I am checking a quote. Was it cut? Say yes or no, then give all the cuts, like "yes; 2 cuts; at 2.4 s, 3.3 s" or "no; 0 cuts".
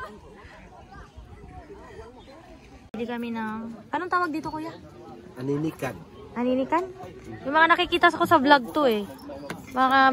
yes; 1 cut; at 2.9 s